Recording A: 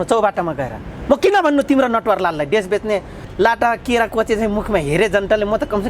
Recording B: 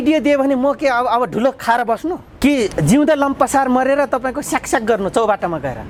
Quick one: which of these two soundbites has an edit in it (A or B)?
A